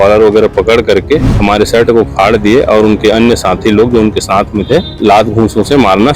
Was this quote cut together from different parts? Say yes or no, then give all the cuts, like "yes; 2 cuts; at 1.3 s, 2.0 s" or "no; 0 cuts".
yes; 2 cuts; at 1.3 s, 5.0 s